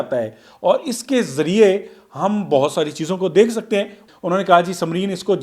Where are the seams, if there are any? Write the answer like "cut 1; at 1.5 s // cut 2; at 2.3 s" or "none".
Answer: cut 1; at 4.0 s